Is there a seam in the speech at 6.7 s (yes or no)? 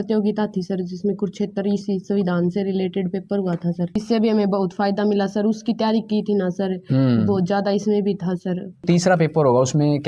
no